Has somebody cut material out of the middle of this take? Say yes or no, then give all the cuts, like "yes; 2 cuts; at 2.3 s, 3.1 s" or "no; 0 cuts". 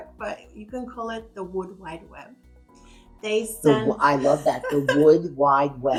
no; 0 cuts